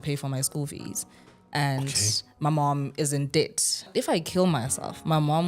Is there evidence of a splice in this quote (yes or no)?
yes